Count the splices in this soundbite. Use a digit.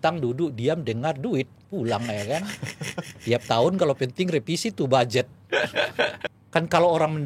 1